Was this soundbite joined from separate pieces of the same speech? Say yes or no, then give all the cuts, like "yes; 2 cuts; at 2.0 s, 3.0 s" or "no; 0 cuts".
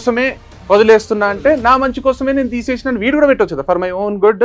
no; 0 cuts